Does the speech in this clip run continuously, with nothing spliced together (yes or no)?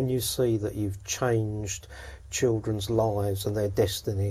yes